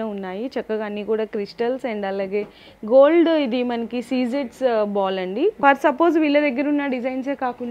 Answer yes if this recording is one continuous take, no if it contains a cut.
no